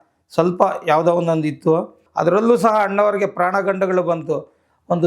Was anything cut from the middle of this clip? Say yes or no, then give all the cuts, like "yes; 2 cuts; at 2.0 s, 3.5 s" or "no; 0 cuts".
yes; 1 cut; at 2.0 s